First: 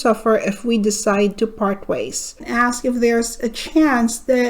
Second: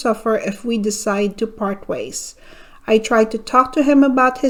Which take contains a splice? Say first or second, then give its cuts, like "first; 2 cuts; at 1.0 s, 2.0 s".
first; 1 cut; at 2.4 s